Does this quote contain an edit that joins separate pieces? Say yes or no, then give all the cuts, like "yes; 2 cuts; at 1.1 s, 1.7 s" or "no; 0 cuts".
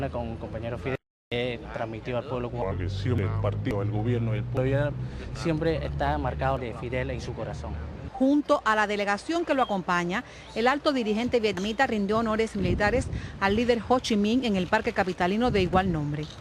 yes; 1 cut; at 1.8 s